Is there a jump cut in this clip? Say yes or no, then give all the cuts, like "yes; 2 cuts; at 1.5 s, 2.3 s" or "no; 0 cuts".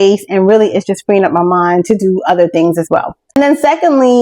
yes; 1 cut; at 3.2 s